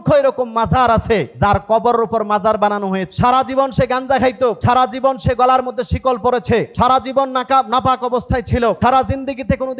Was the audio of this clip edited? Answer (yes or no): yes